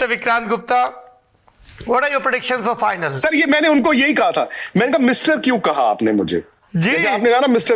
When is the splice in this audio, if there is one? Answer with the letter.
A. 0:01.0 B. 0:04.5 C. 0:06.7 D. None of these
D